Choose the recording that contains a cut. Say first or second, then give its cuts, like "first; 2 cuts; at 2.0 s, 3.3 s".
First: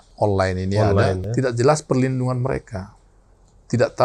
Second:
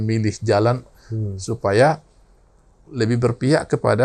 first; 1 cut; at 1.2 s